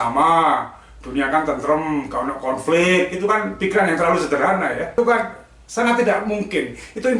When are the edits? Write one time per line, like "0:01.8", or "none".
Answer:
0:04.9